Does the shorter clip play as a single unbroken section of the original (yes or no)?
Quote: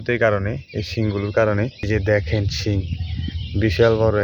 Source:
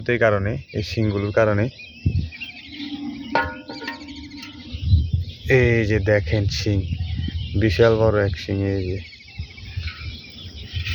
no